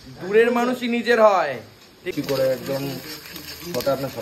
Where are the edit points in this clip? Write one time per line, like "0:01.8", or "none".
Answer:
0:02.0